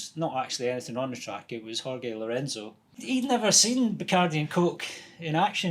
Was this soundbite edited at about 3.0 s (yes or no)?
yes